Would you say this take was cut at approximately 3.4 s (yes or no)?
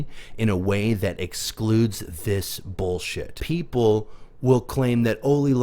yes